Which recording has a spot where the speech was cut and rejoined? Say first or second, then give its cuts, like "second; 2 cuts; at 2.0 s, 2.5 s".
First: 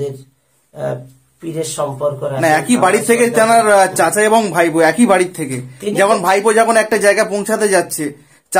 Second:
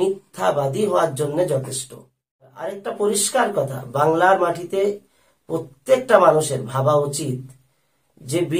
second; 1 cut; at 2.8 s